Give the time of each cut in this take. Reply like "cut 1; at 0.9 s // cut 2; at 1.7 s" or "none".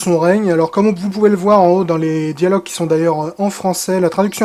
none